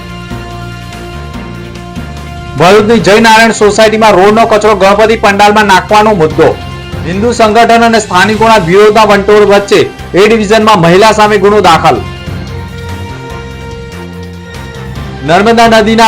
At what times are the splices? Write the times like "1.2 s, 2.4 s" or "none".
1.0 s

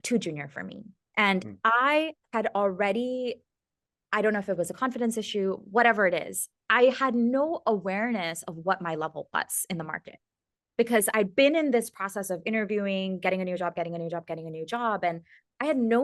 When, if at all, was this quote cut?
none

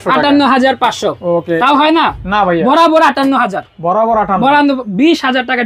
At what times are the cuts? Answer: none

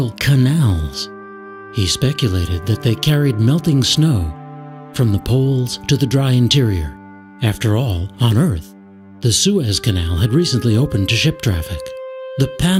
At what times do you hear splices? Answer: none

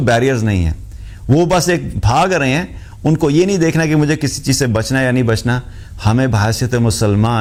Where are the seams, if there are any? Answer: none

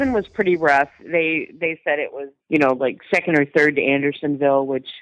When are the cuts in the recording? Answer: none

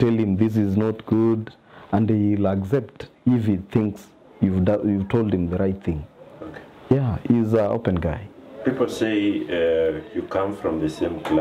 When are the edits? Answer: none

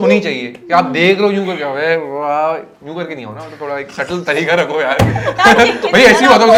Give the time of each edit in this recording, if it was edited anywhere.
none

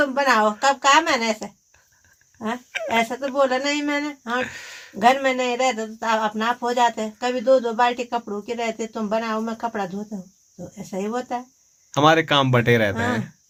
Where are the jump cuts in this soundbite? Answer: none

